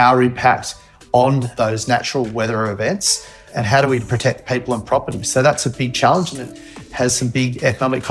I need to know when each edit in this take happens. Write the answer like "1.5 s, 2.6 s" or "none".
1.5 s, 3.4 s